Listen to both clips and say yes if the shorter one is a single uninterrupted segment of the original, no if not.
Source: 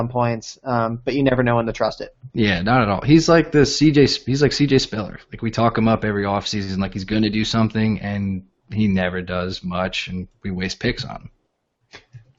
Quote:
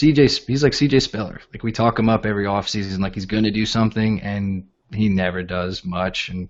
yes